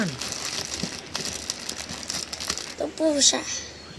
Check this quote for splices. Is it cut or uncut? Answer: cut